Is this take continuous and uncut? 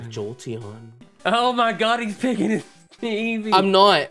no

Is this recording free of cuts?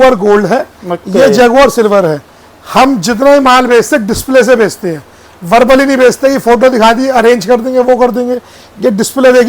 yes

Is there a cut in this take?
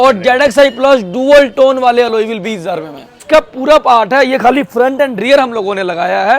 yes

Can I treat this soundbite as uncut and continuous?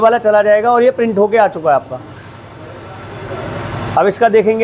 yes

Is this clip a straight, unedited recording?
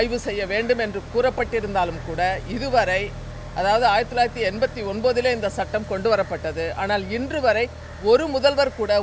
yes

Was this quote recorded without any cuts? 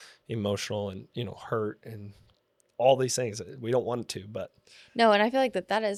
yes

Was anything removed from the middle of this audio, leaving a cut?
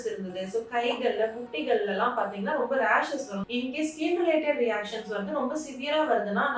yes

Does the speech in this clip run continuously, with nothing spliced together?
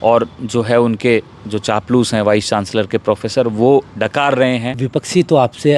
no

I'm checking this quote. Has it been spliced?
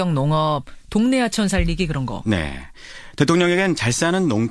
yes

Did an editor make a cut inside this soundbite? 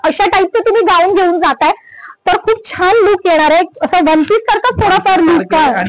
no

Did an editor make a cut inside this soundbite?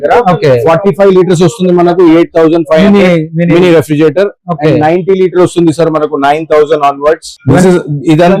yes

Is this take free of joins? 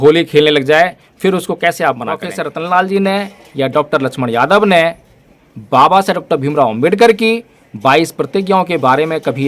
no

